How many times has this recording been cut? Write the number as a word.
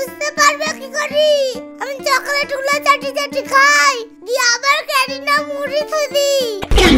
zero